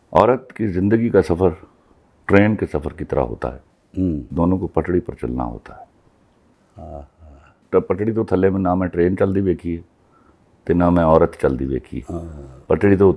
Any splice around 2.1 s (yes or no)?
no